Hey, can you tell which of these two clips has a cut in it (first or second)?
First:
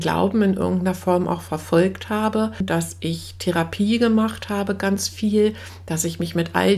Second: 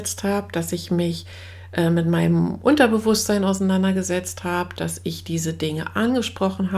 first